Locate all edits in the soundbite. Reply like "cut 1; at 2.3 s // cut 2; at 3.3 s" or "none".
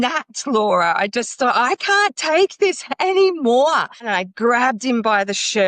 cut 1; at 4.1 s